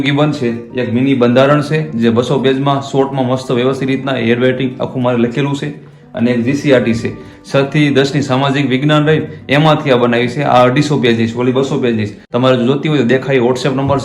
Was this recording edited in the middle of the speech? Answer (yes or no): yes